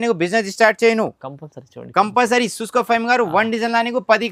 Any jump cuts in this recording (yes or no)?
no